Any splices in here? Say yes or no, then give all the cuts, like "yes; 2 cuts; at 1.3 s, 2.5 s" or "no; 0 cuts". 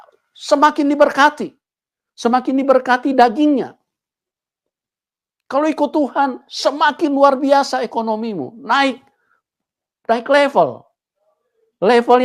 no; 0 cuts